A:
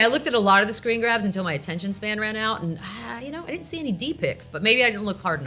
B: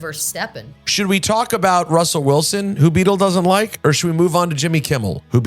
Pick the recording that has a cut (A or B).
B